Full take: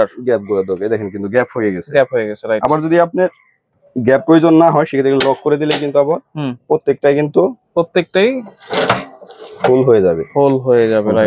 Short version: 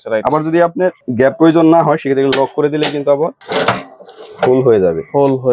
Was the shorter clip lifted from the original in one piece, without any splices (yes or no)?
no